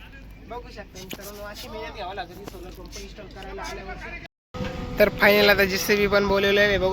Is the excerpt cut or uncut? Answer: cut